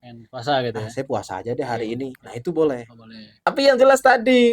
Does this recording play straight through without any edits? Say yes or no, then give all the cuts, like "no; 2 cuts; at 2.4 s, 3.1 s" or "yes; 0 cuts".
no; 1 cut; at 3.5 s